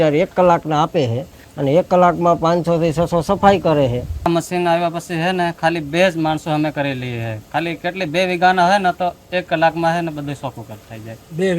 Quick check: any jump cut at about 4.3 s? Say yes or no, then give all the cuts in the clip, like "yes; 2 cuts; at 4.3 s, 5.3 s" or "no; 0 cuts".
yes; 1 cut; at 4.3 s